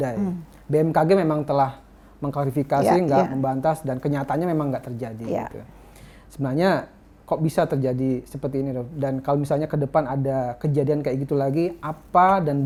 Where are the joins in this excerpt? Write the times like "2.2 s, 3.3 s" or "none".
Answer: none